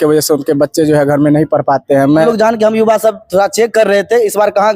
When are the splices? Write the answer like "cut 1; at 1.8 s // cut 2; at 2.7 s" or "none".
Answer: cut 1; at 2.2 s